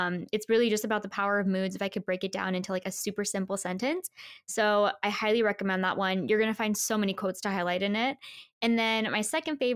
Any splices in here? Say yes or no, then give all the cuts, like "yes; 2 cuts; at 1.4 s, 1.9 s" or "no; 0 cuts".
no; 0 cuts